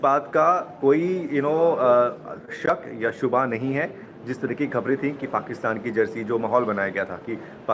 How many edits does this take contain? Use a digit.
0